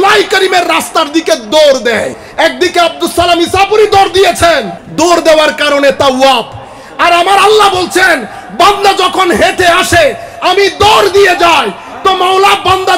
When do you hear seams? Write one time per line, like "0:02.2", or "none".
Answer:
0:02.2
0:04.8

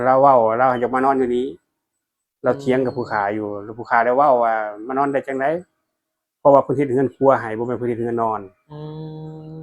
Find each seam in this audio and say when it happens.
none

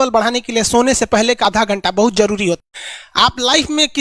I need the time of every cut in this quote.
0:01.4
0:02.6

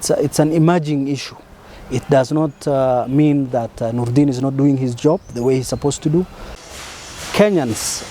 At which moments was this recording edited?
0:06.6

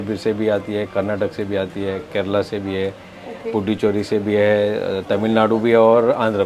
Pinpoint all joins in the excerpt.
none

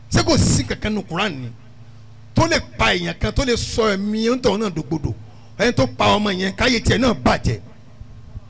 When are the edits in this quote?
none

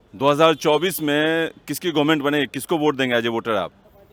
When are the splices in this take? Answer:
none

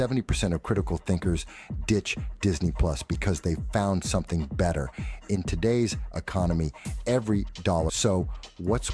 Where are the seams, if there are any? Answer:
0:08.0

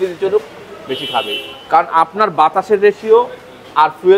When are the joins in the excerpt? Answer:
none

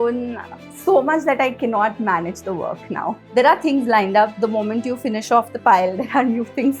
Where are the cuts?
0:03.2

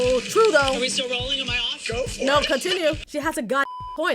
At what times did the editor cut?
0:03.1

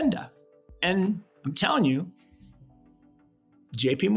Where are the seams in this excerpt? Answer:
none

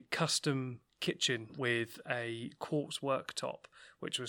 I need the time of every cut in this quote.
0:01.5

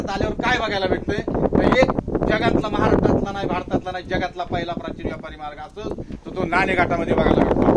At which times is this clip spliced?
none

